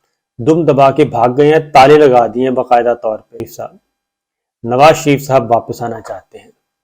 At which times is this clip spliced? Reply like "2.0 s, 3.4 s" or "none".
3.5 s